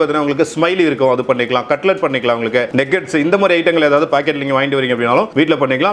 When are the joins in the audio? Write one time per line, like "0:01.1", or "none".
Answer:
none